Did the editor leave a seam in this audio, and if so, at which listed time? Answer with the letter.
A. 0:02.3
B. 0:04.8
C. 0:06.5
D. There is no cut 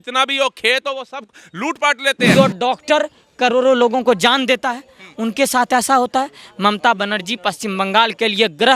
A